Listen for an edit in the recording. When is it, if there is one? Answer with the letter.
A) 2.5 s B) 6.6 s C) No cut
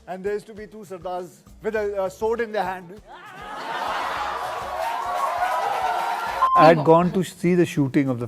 B